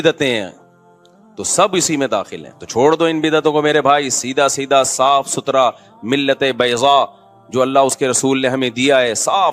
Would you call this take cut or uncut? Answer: uncut